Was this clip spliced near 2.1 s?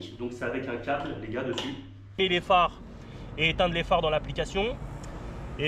yes; 1 cut; at 2.1 s

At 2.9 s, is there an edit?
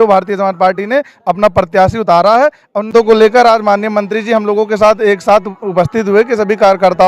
yes; 1 cut; at 2.9 s

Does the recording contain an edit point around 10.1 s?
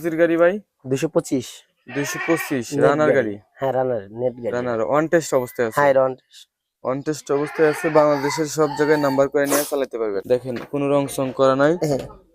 yes; 1 cut; at 10.1 s

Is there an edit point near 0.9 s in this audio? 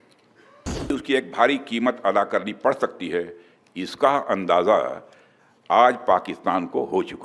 yes; 1 cut; at 0.9 s

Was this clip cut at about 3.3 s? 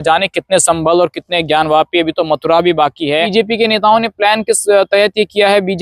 yes; 1 cut; at 3.3 s

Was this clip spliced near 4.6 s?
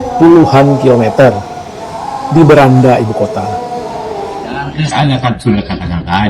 yes; 1 cut; at 4.6 s

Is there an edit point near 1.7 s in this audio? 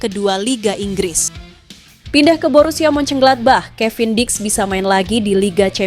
yes; 1 cut; at 1.7 s

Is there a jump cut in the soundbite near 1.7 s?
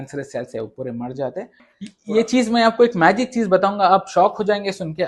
yes; 1 cut; at 1.7 s

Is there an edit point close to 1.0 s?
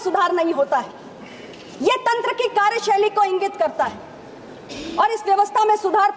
no; 0 cuts

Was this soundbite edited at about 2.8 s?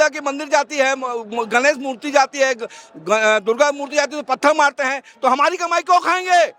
no; 0 cuts

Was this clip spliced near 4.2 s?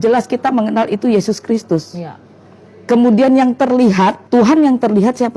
yes; 1 cut; at 4.2 s

